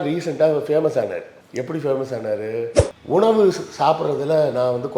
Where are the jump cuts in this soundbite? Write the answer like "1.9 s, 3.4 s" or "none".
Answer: 2.8 s